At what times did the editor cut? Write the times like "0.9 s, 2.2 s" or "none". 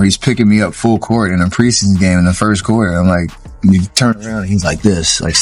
none